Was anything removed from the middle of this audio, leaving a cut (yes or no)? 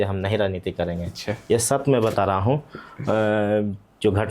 no